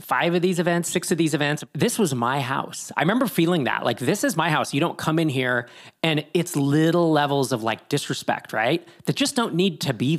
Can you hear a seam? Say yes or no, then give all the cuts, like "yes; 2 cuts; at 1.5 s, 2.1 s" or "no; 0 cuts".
yes; 1 cut; at 1.6 s